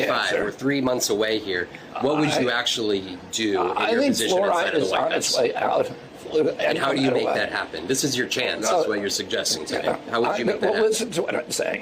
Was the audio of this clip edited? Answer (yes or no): no